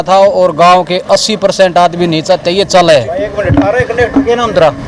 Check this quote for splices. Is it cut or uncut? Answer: cut